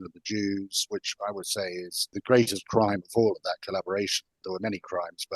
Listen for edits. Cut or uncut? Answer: cut